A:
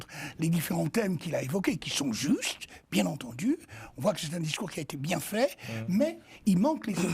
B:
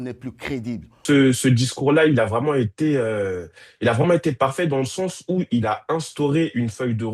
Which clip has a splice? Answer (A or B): B